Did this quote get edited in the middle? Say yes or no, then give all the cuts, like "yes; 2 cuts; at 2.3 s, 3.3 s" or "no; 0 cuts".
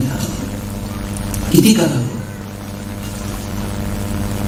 no; 0 cuts